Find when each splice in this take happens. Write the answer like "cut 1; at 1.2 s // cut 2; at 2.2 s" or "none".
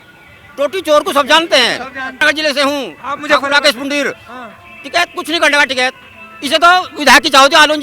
cut 1; at 2.2 s